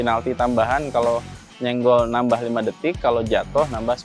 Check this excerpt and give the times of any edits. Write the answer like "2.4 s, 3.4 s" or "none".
none